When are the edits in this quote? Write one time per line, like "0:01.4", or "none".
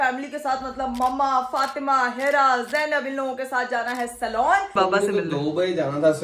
0:04.7